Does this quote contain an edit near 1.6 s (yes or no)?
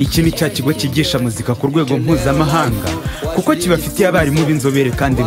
no